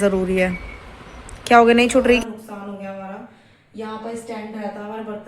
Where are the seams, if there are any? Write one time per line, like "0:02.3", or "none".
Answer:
0:02.2